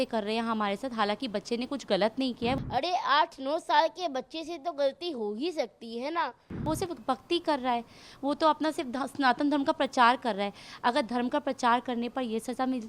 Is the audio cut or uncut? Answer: cut